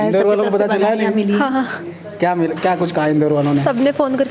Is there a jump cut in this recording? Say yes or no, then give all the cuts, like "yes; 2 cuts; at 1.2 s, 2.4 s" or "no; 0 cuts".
no; 0 cuts